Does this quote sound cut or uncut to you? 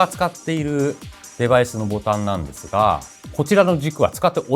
cut